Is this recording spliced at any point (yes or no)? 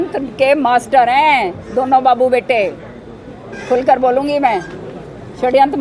no